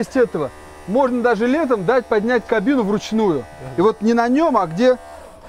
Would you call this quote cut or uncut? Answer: uncut